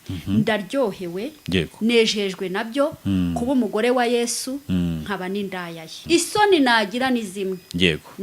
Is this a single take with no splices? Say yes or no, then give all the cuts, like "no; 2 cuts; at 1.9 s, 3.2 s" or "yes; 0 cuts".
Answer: no; 1 cut; at 6.0 s